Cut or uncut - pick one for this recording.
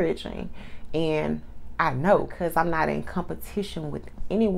cut